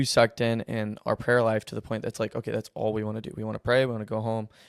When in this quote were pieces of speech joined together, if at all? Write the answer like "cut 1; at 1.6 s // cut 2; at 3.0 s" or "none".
none